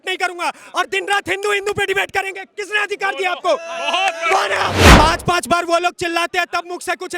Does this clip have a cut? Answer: yes; 1 cut; at 4.8 s

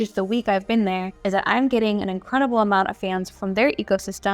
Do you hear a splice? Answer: yes; 2 cuts; at 1.1 s, 3.3 s

